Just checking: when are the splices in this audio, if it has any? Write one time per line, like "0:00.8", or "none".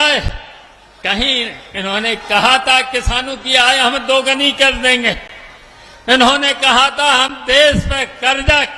none